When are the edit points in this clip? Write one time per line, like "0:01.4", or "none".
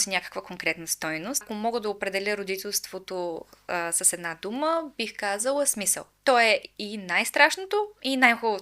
0:01.5
0:06.0